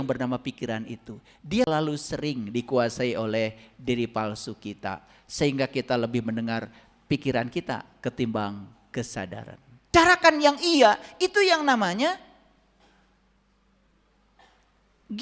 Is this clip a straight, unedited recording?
no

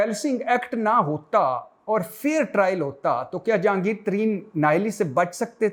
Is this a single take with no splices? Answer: yes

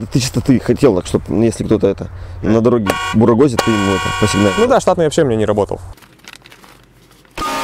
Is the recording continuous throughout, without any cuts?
yes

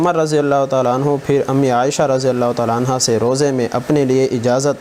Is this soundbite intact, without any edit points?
yes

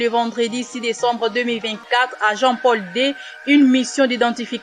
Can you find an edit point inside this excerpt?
no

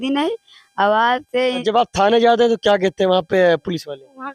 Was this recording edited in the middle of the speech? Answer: yes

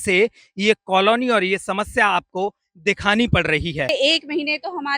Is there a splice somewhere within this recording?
yes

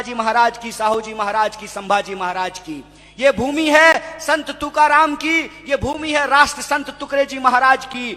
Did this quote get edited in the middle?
no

